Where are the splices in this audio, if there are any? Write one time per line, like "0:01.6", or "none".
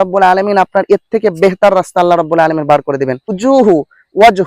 0:03.4